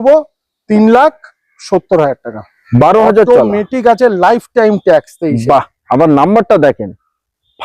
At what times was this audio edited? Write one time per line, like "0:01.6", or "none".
0:02.6